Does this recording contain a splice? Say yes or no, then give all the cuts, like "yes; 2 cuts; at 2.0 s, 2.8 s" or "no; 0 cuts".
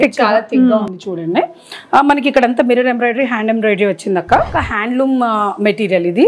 yes; 1 cut; at 4.5 s